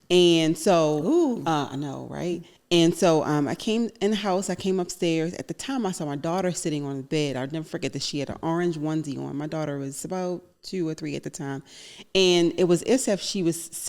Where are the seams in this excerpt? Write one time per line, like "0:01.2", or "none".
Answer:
0:02.5